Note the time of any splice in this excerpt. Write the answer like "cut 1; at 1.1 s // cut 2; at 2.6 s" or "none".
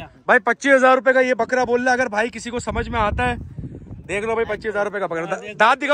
none